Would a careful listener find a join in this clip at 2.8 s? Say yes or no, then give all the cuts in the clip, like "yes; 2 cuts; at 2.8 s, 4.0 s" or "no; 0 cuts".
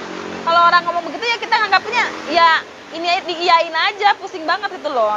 no; 0 cuts